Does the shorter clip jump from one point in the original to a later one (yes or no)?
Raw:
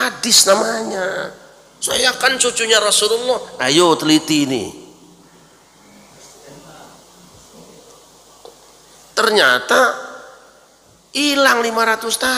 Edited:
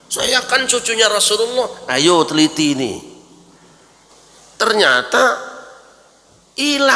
yes